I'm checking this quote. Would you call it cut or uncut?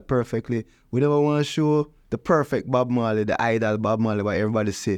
uncut